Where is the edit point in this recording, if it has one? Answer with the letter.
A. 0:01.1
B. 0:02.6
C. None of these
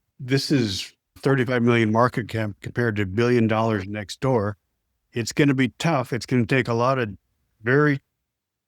A